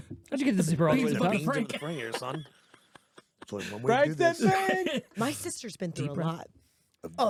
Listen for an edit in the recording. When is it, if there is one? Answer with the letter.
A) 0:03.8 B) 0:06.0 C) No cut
C